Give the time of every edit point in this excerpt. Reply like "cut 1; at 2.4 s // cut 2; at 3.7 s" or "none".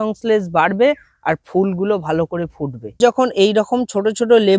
cut 1; at 3.0 s